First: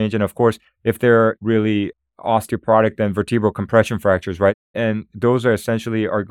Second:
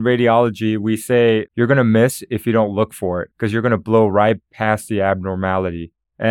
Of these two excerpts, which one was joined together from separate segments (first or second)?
second